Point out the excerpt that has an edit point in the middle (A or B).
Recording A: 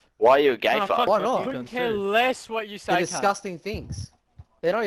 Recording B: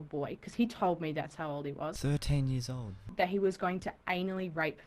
B